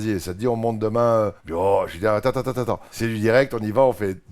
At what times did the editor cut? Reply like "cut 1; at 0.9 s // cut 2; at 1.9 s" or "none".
cut 1; at 1.4 s // cut 2; at 2.9 s